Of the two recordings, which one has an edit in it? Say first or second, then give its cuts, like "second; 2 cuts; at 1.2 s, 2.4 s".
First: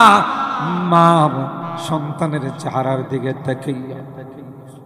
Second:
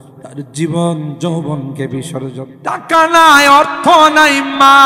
second; 1 cut; at 2.5 s